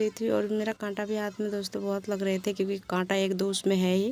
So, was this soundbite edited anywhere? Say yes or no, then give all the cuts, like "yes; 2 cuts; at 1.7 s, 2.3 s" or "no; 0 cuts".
no; 0 cuts